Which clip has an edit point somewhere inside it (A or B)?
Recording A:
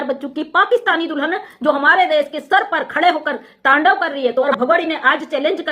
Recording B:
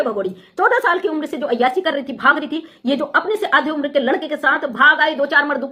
A